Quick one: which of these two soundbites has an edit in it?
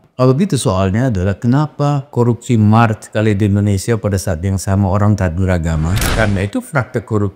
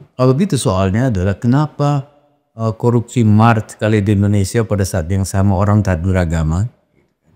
first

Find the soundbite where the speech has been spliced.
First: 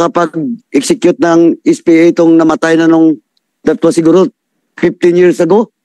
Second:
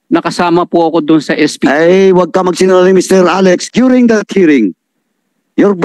second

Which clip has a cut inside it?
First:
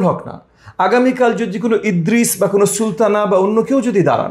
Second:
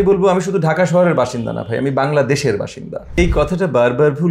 second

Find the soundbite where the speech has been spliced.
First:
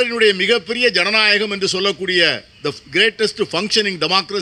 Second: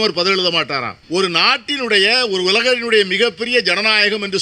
second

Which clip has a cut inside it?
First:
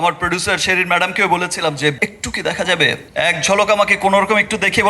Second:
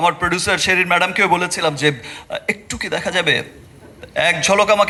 first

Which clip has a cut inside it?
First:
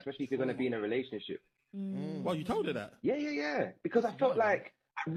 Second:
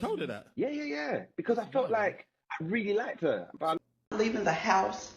second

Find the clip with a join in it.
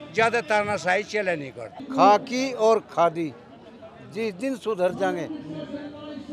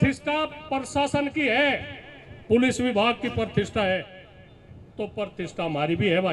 first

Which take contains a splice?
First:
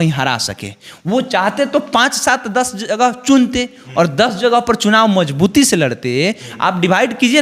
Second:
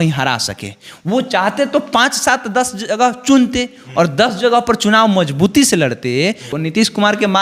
second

